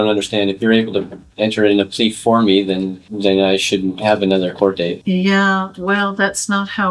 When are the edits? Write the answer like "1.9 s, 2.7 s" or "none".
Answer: none